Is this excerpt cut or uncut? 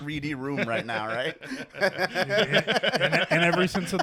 uncut